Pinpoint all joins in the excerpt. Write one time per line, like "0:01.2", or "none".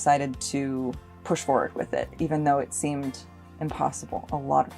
0:01.1